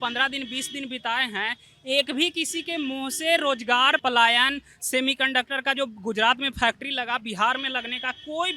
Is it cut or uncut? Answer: cut